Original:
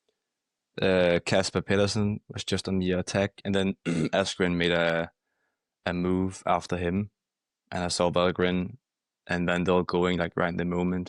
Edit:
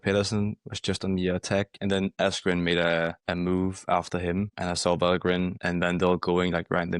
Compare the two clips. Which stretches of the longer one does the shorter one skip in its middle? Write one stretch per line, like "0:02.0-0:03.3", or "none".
0:03.8-0:04.1
0:05.1-0:05.8
0:07.1-0:07.7
0:08.7-0:09.2